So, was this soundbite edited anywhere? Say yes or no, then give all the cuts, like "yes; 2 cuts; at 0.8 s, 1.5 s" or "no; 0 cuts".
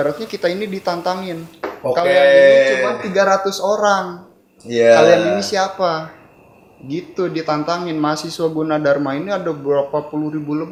no; 0 cuts